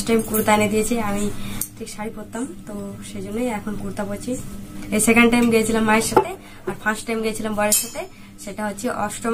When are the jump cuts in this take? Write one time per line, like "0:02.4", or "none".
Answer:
0:04.8